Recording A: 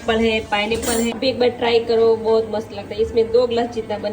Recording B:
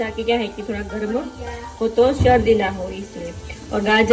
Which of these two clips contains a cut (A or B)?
A